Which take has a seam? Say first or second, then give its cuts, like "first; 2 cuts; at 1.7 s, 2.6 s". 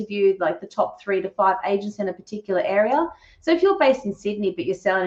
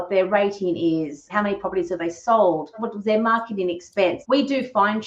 second; 3 cuts; at 1.3 s, 2.9 s, 4.2 s